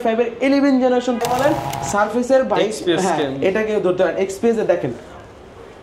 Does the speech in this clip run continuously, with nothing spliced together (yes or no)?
no